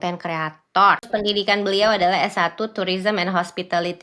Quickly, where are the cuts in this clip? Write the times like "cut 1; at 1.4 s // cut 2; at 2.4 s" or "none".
cut 1; at 1.1 s